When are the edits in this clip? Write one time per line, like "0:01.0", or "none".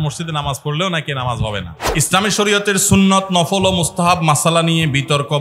0:01.8